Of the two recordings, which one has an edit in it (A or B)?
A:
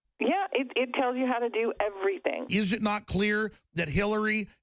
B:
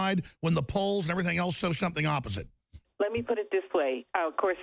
A